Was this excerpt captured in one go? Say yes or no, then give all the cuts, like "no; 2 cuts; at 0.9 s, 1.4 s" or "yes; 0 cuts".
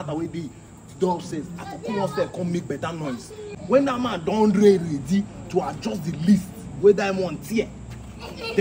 no; 1 cut; at 3.5 s